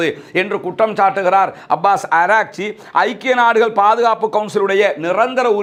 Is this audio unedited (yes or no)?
yes